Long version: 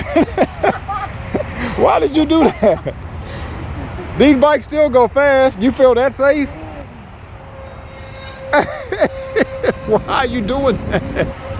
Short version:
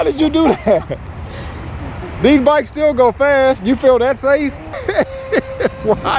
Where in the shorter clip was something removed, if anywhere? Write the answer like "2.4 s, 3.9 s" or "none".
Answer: 4.7 s